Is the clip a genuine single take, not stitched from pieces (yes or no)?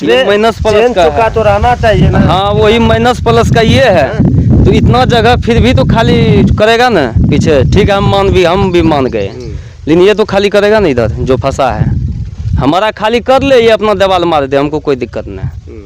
yes